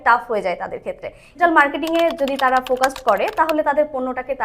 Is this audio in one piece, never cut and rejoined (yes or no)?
no